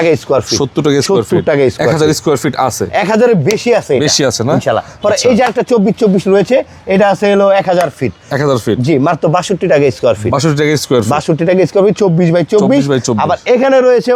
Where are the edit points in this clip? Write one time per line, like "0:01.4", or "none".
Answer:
none

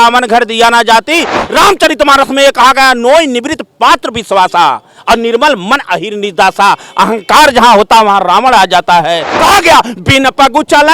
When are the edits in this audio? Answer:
0:01.4
0:09.3

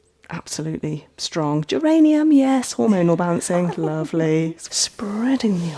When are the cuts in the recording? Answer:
0:04.7

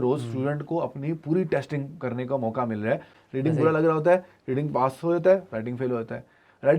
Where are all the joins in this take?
0:03.2

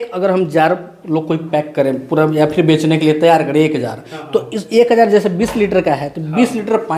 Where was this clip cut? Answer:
none

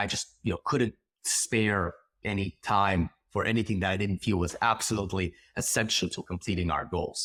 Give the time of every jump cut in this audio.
none

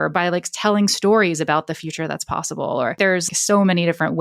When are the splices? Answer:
0:03.2

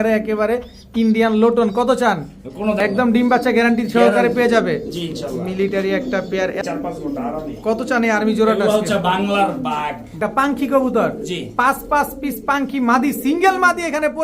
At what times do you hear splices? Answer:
0:02.8
0:06.6
0:10.2

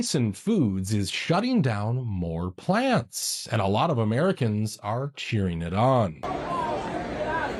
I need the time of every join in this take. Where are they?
none

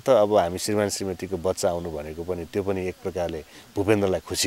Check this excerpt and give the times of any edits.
none

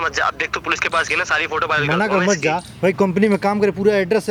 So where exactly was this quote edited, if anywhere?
none

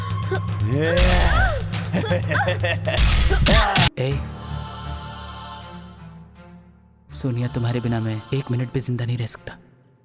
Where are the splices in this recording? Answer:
0:03.9

